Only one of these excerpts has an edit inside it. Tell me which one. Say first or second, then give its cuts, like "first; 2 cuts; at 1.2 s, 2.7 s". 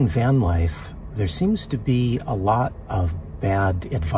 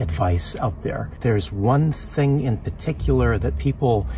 second; 1 cut; at 1.2 s